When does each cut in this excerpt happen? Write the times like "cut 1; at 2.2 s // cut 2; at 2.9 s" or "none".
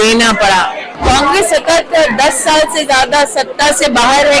cut 1; at 0.9 s